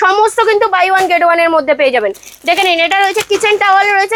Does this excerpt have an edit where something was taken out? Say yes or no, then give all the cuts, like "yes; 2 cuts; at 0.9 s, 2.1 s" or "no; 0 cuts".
no; 0 cuts